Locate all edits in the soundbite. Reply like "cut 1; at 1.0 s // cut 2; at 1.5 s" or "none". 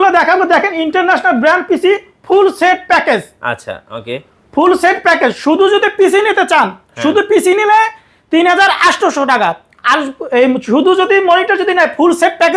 none

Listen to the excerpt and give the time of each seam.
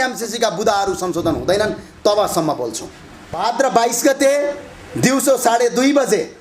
cut 1; at 3.4 s

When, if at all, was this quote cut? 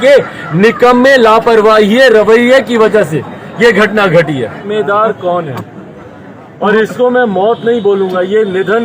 cut 1; at 4.7 s

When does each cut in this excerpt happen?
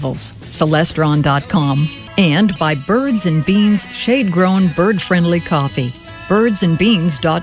cut 1; at 2.0 s

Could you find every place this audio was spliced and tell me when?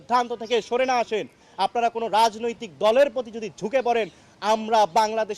cut 1; at 1.4 s

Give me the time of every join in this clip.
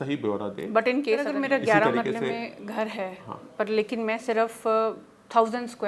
cut 1; at 1.3 s

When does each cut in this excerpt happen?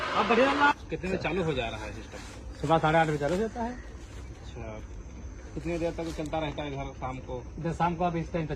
cut 1; at 0.7 s // cut 2; at 4.8 s

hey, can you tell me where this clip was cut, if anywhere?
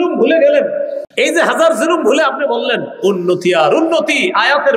cut 1; at 1.0 s

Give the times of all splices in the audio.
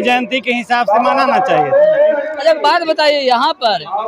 none

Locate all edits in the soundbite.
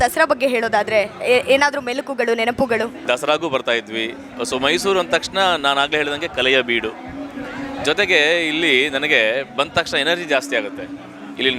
cut 1; at 3.0 s

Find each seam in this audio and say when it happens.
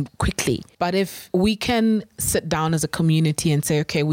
cut 1; at 1.1 s

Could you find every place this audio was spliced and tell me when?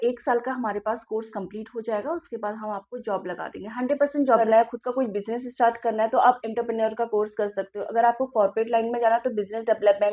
cut 1; at 4.4 s

